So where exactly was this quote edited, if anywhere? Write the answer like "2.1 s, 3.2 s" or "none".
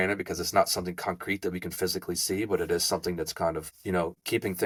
none